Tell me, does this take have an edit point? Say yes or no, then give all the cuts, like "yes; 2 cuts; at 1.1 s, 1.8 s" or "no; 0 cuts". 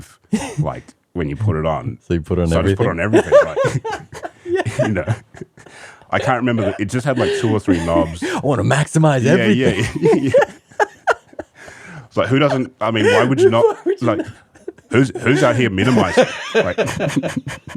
no; 0 cuts